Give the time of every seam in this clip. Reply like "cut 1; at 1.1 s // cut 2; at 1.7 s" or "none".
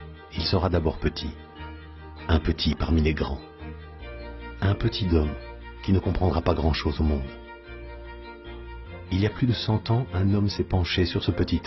cut 1; at 2.6 s